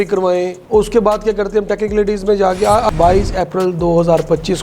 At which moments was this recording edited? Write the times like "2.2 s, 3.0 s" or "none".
2.9 s